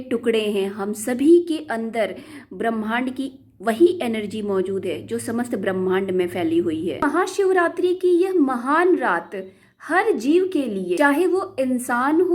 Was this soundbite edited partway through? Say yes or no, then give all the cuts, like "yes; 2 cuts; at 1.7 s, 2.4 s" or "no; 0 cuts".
yes; 2 cuts; at 7.0 s, 11.0 s